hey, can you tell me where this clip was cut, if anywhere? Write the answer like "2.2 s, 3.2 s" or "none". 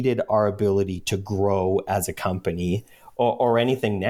none